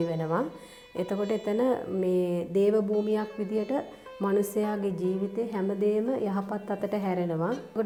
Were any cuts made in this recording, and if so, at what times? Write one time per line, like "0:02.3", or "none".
none